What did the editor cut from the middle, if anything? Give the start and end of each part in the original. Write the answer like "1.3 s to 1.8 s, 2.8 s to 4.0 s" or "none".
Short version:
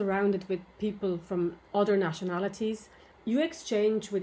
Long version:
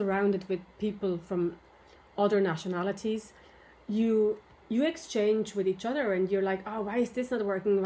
1.6 s to 2.1 s, 3.5 s to 4.5 s

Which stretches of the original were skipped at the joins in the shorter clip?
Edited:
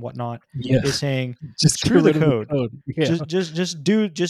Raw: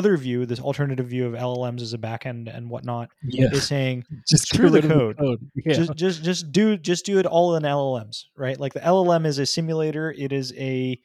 none

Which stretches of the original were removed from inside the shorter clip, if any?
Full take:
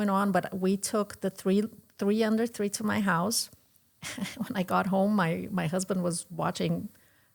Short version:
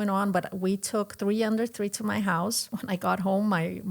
1.1 s to 1.9 s, 3.5 s to 4.3 s

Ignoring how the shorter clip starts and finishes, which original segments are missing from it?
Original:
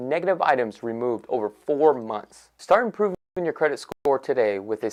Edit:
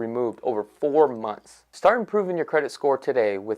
3.4 s to 3.7 s

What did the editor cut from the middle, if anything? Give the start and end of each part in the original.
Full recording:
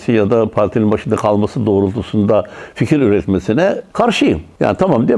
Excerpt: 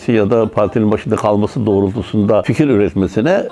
2.5 s to 2.8 s

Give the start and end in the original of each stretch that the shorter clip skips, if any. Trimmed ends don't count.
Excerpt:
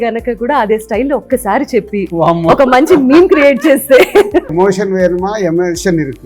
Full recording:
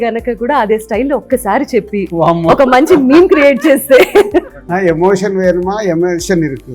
4.5 s to 5.0 s

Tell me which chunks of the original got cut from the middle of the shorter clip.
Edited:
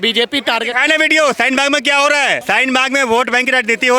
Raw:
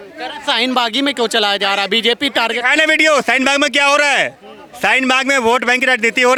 4.3 s to 4.8 s

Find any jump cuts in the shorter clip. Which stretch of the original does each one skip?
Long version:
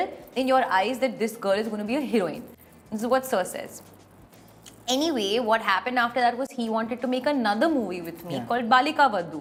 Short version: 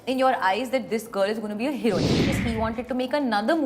2.6 s to 6.5 s

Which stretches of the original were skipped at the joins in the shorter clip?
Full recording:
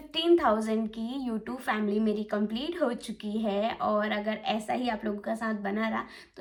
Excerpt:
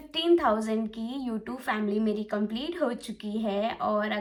none

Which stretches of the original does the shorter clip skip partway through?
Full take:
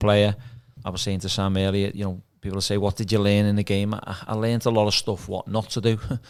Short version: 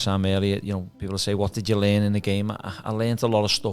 2.2 s to 2.4 s

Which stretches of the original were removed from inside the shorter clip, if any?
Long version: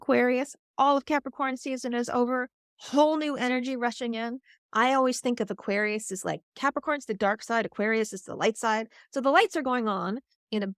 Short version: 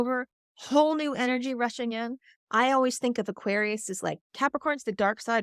none

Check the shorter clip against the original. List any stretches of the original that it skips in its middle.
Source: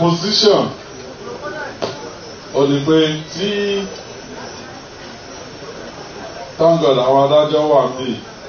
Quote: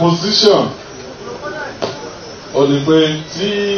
none

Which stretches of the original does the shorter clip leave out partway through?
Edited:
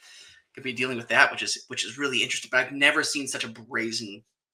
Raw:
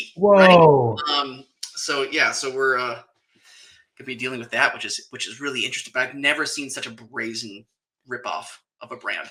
none

